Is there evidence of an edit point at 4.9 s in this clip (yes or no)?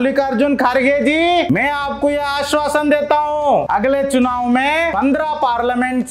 yes